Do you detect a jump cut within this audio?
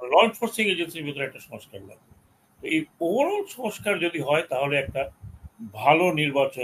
no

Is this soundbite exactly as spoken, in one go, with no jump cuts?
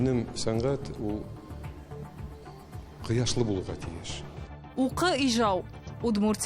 no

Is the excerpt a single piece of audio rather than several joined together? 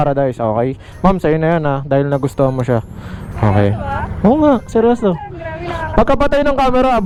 yes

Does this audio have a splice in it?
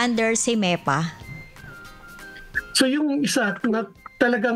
no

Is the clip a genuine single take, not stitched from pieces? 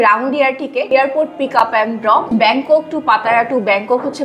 no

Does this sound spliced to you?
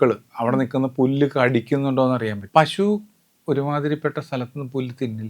yes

